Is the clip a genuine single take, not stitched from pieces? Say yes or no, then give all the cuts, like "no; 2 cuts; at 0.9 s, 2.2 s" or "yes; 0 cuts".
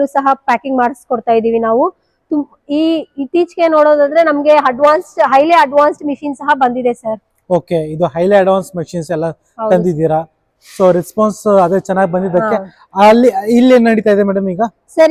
yes; 0 cuts